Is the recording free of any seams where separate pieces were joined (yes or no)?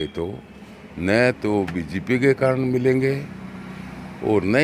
yes